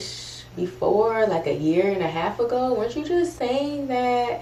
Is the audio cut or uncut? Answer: uncut